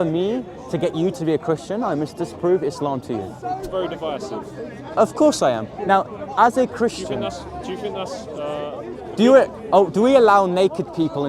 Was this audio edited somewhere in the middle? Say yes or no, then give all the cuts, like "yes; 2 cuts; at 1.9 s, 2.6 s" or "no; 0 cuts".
yes; 1 cut; at 3.7 s